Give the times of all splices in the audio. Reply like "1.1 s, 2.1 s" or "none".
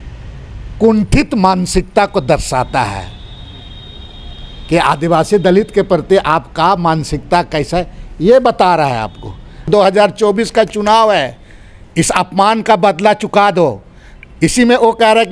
9.6 s